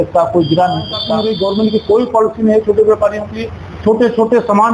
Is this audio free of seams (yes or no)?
no